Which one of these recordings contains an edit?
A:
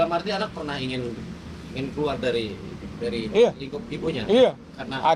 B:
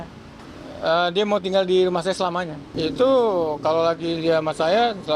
B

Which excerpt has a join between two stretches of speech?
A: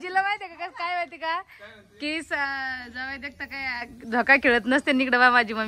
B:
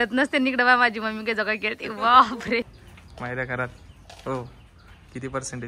B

